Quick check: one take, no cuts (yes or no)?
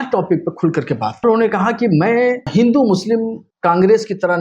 no